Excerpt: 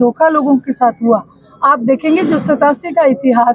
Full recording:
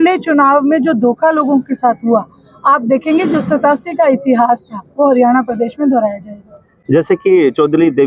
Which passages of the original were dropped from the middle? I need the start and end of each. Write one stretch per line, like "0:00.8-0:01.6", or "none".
none